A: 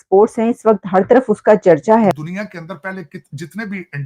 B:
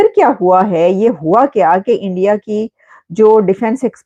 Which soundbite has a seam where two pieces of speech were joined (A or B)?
A